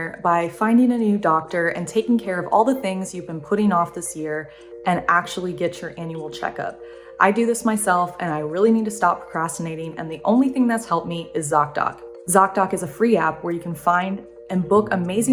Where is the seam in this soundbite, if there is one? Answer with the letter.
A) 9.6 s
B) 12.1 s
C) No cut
B